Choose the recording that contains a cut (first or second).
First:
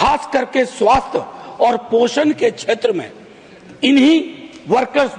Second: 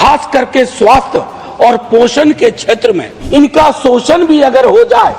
second